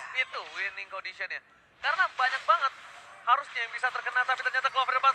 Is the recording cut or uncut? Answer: uncut